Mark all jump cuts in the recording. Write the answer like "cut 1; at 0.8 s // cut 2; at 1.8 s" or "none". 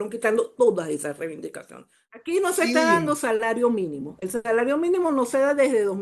cut 1; at 2.0 s